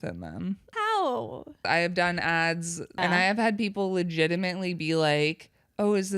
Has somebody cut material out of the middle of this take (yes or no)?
yes